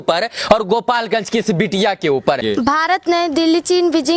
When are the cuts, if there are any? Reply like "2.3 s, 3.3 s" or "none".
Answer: 2.4 s